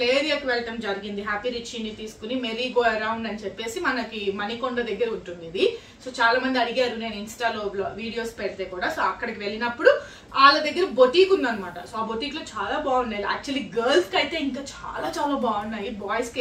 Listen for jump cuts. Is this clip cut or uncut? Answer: uncut